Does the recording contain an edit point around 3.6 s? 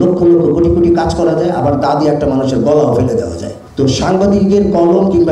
no; 0 cuts

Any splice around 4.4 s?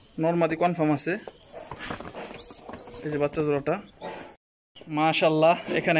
yes; 1 cut; at 4.4 s

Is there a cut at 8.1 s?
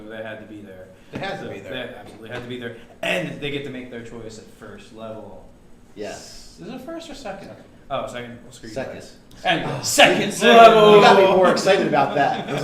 yes; 1 cut; at 8.1 s

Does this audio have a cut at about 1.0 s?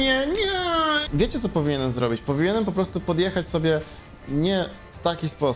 yes; 1 cut; at 1.0 s

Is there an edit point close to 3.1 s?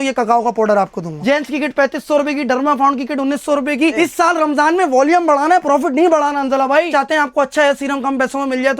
no; 2 cuts; at 1.1 s, 6.9 s

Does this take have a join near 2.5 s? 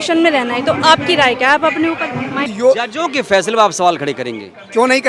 yes; 1 cut; at 2.5 s

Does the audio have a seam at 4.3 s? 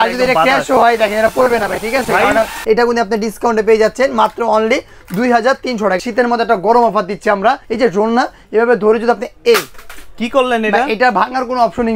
no; 3 cuts; at 2.6 s, 6.0 s, 7.7 s

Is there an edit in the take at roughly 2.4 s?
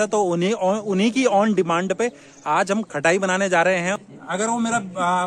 no; 1 cut; at 4.0 s

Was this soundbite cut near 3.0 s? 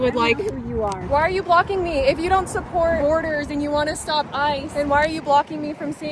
yes; 3 cuts; at 1.0 s, 3.0 s, 4.7 s

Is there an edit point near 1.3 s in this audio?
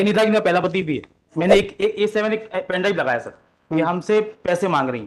yes; 1 cut; at 1.3 s

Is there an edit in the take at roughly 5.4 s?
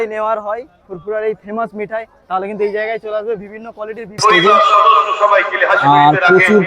no; 1 cut; at 4.2 s

